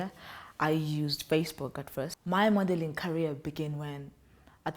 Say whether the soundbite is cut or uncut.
cut